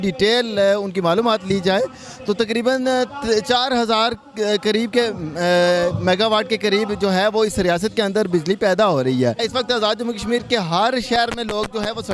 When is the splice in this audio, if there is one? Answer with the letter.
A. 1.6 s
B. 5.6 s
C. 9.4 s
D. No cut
C